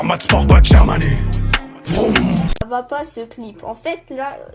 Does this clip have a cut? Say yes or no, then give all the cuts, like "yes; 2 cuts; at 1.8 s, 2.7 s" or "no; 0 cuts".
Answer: yes; 1 cut; at 2.6 s